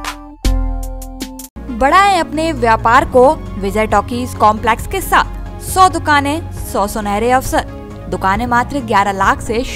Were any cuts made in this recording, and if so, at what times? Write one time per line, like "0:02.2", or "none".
none